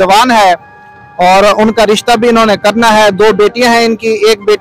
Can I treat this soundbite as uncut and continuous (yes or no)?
yes